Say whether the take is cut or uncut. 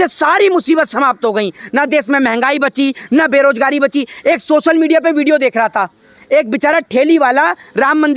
uncut